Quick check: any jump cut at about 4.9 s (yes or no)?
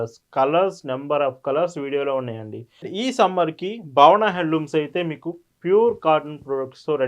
no